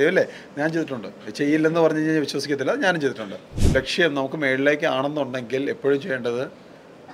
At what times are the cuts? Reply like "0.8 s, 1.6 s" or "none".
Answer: 3.5 s